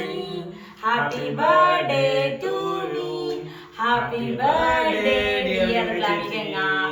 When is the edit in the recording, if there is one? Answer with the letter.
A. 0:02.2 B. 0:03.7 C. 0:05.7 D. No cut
D